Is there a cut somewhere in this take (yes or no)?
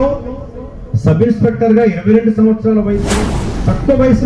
yes